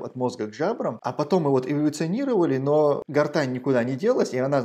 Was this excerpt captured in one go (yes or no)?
no